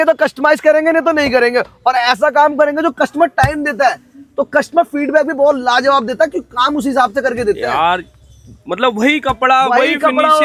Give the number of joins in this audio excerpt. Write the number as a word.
zero